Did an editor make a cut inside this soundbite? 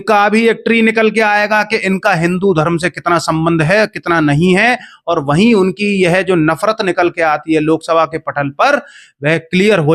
no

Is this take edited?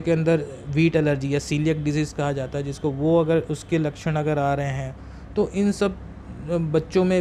no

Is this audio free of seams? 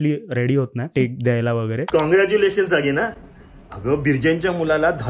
no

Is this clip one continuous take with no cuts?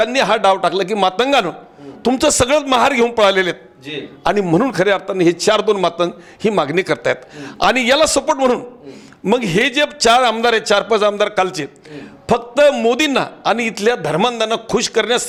yes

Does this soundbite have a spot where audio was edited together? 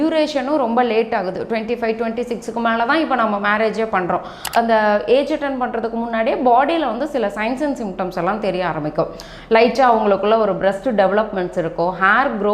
yes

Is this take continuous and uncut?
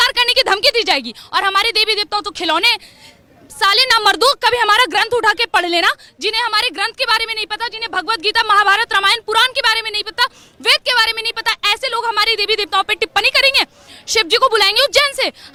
yes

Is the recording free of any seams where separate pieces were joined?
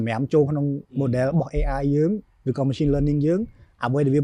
yes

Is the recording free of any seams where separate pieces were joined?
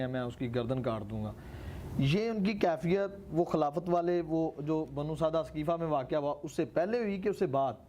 yes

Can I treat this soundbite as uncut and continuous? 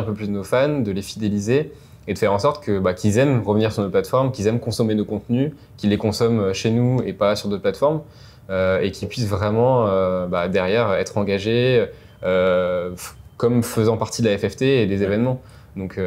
yes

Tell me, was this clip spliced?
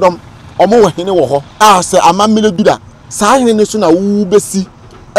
yes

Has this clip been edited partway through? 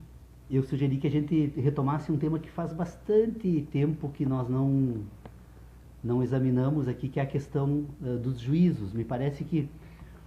no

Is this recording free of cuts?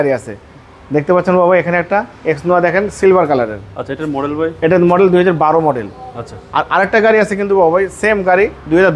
yes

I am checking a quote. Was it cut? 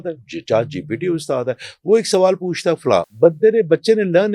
yes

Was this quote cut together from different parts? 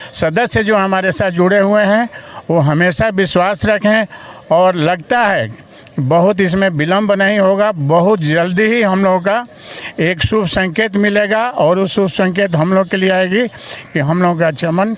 no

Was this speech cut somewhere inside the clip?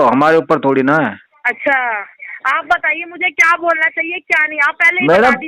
yes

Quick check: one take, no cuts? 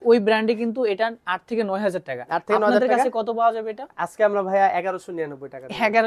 yes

